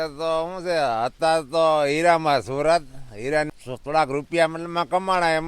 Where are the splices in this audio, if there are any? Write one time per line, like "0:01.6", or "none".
0:03.5